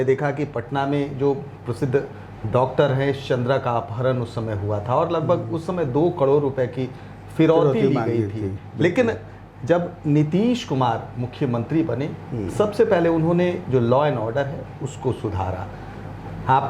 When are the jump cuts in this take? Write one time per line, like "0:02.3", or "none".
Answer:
none